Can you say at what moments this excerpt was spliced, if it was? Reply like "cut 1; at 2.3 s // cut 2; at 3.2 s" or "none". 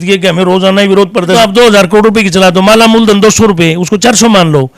cut 1; at 1.3 s